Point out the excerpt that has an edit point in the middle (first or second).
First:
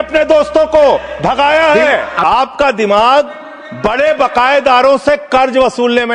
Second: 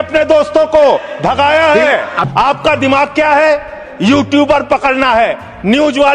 second